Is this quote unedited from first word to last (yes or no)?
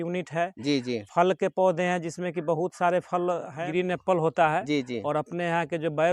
no